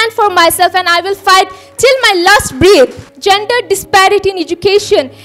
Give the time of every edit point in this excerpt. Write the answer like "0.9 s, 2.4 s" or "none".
3.1 s